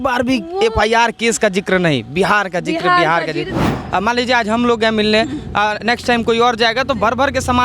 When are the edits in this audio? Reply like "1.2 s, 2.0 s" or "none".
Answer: 3.6 s